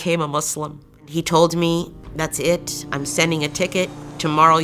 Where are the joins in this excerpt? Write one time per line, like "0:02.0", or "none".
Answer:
0:01.0